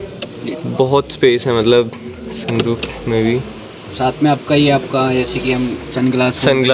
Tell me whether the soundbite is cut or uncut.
uncut